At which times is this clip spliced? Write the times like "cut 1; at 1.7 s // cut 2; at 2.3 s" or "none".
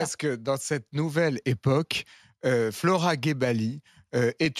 none